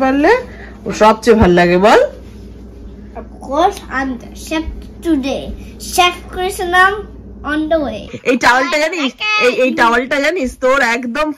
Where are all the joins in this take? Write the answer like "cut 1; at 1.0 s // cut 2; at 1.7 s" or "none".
cut 1; at 8.2 s